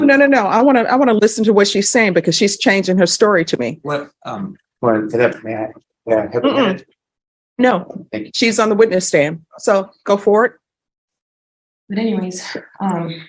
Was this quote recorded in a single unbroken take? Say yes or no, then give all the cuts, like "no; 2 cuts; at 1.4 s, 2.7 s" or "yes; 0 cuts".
yes; 0 cuts